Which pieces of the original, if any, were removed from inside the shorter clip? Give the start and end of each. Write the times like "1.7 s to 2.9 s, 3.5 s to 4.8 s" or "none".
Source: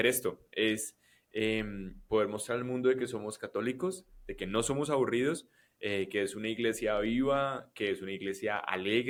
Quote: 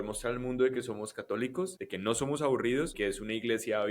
4.1 s to 4.3 s, 5.4 s to 6.1 s